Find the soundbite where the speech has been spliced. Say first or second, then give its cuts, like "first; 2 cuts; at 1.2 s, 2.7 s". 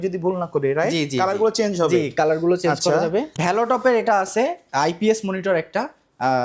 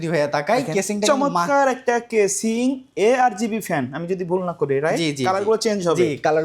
first; 1 cut; at 3.3 s